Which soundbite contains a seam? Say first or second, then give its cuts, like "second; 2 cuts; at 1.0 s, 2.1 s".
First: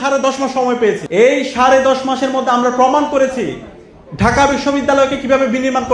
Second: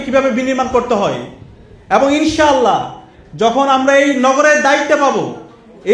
first; 1 cut; at 1.0 s